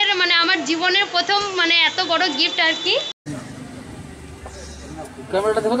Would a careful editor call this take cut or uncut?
cut